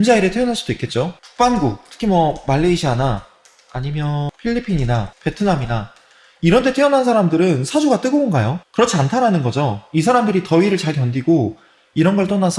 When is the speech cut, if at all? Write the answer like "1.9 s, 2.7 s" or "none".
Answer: 1.2 s